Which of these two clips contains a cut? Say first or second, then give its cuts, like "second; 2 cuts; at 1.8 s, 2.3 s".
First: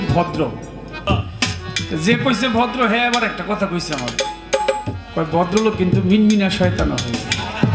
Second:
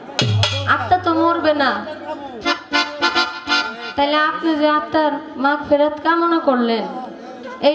first; 1 cut; at 1.0 s